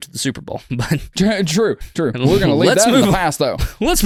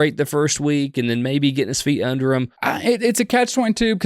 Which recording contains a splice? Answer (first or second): second